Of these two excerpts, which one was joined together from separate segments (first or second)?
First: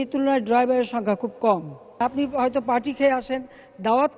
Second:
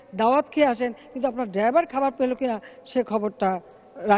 first